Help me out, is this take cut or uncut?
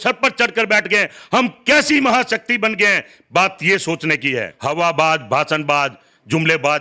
cut